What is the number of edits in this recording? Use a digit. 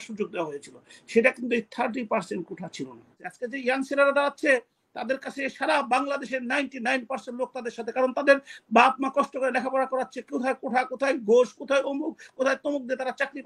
1